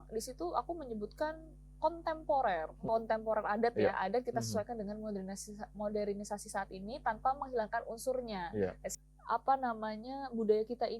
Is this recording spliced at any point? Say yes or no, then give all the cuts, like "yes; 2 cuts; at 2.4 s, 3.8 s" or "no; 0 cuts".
yes; 2 cuts; at 2.8 s, 8.8 s